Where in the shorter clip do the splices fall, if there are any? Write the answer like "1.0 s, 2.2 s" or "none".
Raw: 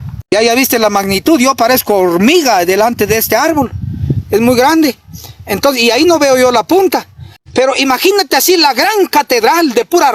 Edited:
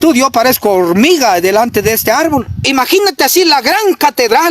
2.7 s